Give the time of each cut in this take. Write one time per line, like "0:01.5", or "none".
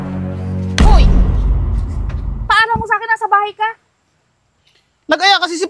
0:02.4

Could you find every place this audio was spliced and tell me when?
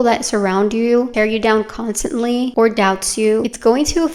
none

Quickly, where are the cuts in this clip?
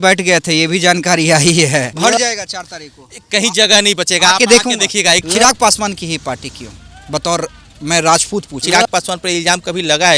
0:01.9
0:05.2
0:08.6

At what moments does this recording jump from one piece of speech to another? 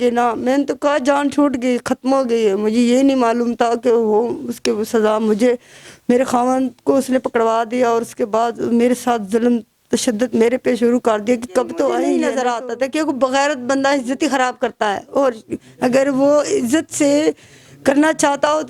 0:12.2

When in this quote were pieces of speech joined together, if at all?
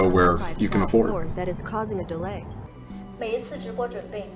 0:02.6

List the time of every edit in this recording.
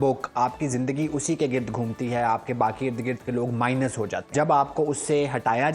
0:04.3

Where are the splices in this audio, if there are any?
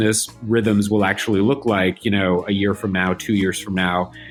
none

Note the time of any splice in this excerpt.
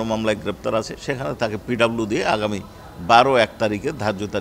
0:01.0

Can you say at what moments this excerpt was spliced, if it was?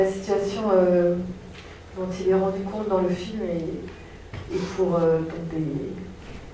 none

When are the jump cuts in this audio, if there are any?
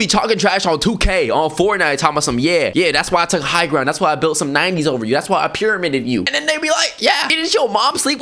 none

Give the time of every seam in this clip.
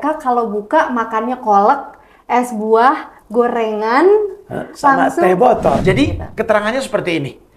0:05.8

